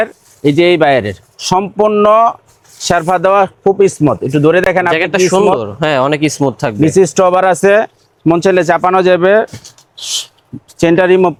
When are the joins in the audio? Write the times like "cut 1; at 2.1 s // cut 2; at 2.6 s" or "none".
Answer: none